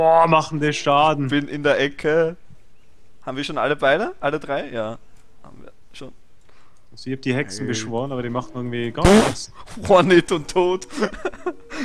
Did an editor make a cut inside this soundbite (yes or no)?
no